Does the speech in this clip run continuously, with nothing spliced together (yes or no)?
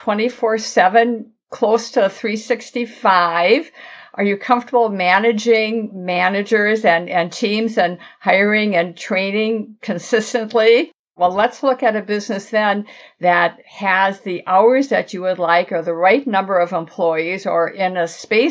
no